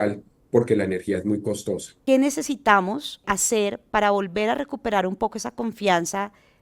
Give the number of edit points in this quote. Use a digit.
2